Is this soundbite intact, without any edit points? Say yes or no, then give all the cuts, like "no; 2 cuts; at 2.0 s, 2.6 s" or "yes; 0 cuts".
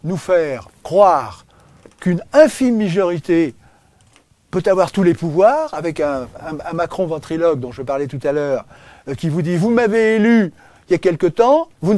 yes; 0 cuts